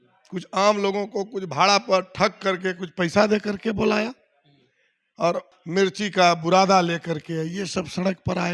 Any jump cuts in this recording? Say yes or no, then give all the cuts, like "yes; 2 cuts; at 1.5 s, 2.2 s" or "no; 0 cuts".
yes; 1 cut; at 5.5 s